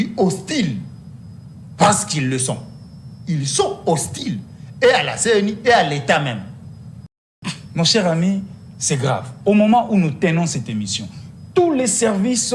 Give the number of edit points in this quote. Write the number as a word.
one